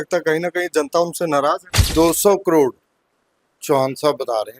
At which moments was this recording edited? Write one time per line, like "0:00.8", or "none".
0:01.7